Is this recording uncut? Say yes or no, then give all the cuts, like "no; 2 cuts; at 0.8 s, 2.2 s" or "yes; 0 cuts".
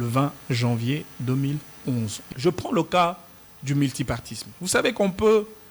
no; 1 cut; at 2.2 s